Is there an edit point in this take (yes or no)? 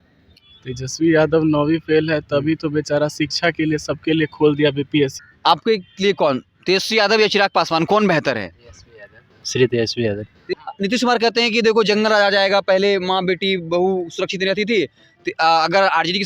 yes